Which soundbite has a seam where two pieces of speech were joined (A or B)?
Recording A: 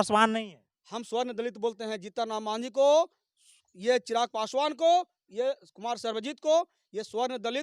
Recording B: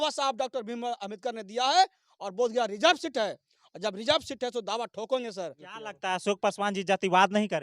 B